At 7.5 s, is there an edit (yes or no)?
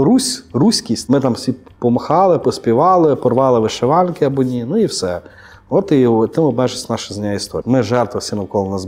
yes